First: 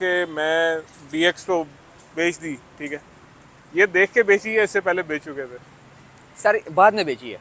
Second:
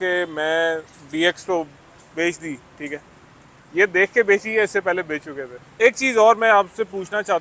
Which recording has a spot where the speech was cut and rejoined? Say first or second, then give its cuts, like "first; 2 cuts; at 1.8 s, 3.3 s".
second; 1 cut; at 5.8 s